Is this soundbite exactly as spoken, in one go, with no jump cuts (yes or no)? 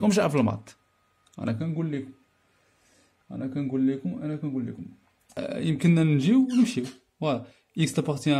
no